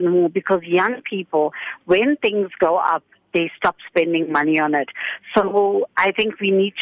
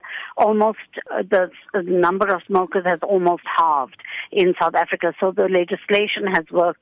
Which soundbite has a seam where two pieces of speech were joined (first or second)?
second